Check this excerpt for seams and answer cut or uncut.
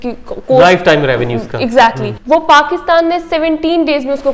cut